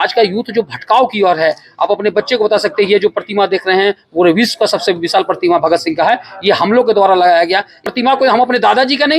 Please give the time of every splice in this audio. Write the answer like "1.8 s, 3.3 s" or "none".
7.9 s